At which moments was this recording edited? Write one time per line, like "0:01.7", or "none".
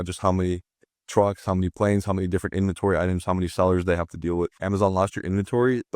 0:04.6